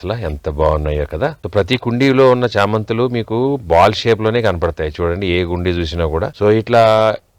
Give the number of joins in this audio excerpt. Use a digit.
1